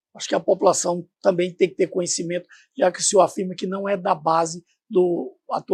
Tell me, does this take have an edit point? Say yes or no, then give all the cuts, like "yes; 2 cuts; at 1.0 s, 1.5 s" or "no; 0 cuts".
no; 0 cuts